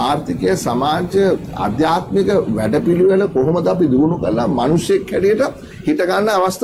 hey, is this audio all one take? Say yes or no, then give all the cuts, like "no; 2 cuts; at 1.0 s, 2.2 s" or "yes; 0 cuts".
yes; 0 cuts